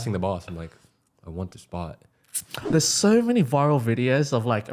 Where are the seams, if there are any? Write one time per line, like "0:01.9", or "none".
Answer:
0:02.7